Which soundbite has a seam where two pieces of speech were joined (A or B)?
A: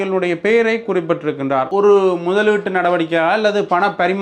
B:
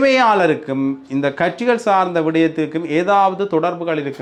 A